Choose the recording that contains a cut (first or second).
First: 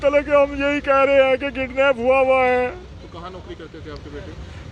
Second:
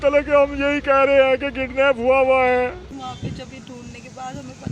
second